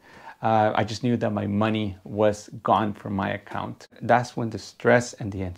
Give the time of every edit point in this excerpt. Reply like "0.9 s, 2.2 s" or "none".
3.9 s